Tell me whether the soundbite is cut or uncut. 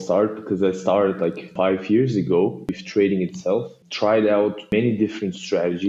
cut